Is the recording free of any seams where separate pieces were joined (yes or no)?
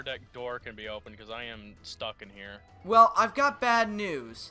no